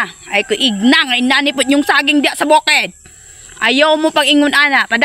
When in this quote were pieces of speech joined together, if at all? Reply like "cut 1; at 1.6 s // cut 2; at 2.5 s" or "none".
none

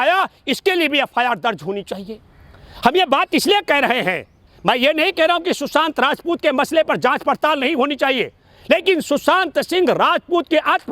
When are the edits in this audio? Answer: none

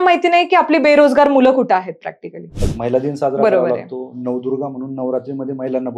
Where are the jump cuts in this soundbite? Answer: cut 1; at 2.7 s

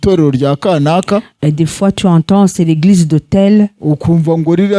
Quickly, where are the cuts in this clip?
none

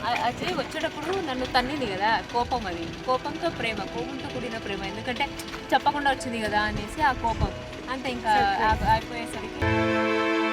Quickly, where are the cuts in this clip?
cut 1; at 9.6 s

